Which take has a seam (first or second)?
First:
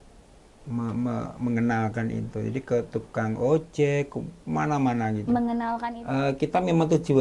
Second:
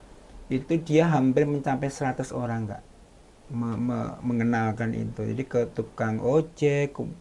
first